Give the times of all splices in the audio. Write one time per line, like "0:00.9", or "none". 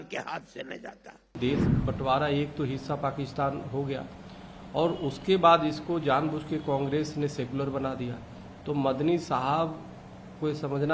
0:01.4